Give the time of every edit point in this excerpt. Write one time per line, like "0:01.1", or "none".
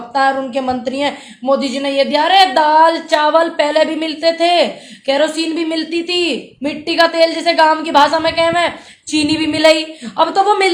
none